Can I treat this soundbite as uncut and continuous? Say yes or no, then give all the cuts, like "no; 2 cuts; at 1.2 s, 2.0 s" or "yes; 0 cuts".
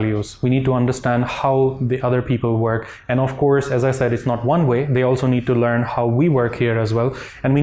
yes; 0 cuts